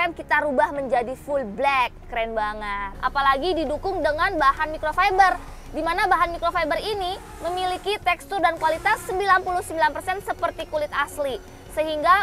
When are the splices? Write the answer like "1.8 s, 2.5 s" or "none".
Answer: 2.9 s